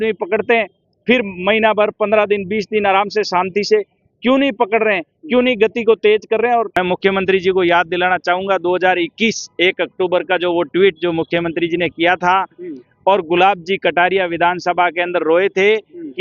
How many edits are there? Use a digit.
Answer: 1